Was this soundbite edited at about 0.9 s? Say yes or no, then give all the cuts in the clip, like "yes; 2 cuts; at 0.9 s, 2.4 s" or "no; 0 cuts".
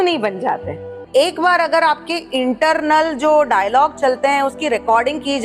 yes; 1 cut; at 0.9 s